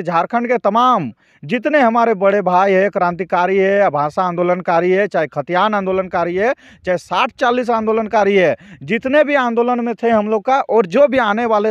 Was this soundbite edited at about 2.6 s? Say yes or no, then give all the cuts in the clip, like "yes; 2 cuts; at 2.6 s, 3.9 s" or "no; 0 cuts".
no; 0 cuts